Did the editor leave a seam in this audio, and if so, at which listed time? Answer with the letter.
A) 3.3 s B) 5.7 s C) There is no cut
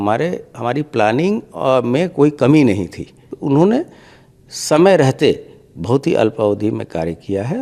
A